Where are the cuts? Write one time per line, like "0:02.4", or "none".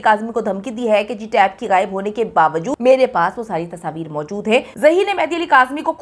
0:02.7
0:04.7